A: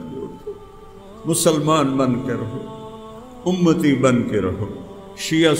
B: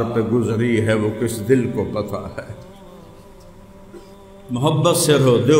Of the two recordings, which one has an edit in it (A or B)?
B